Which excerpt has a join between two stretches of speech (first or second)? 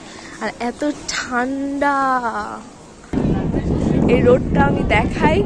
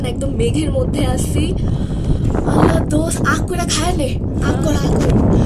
first